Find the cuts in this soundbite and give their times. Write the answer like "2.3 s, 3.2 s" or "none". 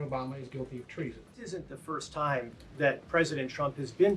1.3 s